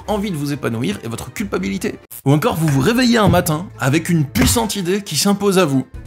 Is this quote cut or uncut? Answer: cut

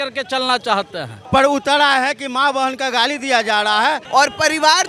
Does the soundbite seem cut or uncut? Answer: cut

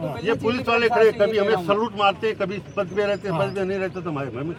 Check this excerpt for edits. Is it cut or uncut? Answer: uncut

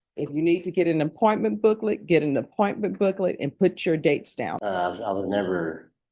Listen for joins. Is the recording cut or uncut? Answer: cut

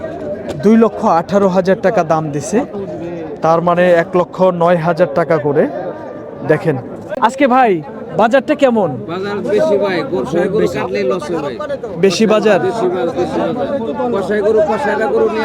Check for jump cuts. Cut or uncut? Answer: cut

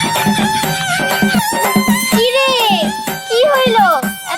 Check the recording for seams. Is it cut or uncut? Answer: cut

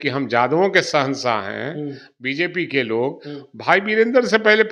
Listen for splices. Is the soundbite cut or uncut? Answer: uncut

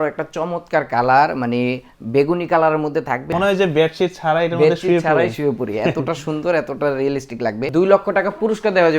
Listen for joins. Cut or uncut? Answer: cut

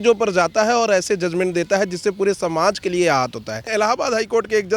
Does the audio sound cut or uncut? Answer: cut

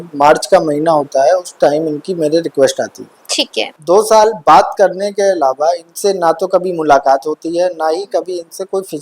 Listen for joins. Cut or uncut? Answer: cut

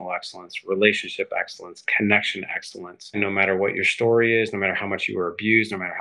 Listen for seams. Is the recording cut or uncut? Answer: cut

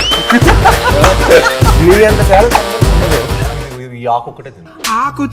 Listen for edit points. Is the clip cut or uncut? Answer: cut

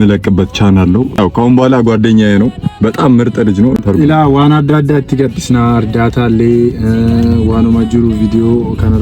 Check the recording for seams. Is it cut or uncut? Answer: cut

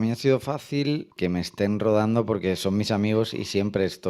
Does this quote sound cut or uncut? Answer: cut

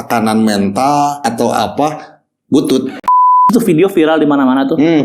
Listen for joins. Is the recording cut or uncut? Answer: cut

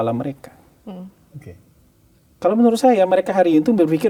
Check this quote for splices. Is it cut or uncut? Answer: uncut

